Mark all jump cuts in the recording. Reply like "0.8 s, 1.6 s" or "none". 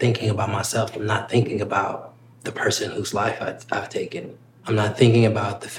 2.3 s, 4.6 s